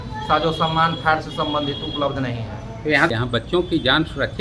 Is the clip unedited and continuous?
no; 1 cut; at 3.1 s

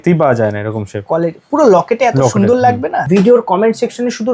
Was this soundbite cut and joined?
yes; 1 cut; at 3.0 s

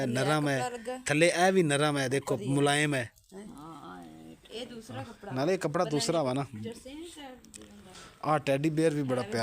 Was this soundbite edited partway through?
yes; 1 cut; at 8.0 s

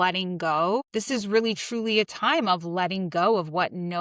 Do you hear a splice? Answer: no; 0 cuts

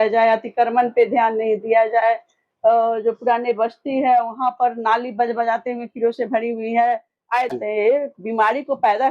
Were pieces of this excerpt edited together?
yes; 1 cut; at 7.5 s

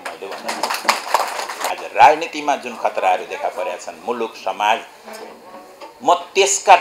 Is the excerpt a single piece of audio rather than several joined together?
no; 1 cut; at 1.7 s

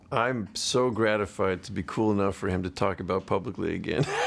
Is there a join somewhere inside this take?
no; 0 cuts

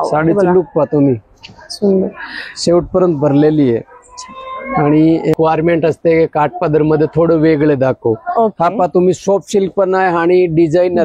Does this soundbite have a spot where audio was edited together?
yes; 1 cut; at 5.3 s

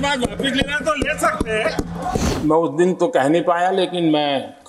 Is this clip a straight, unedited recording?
no; 1 cut; at 2.3 s

